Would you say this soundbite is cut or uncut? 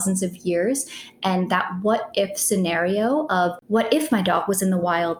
cut